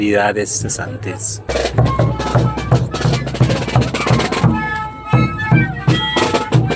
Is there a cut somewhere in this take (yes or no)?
yes